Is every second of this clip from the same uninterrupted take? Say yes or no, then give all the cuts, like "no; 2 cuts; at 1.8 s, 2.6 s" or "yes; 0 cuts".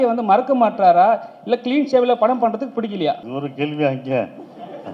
no; 1 cut; at 3.2 s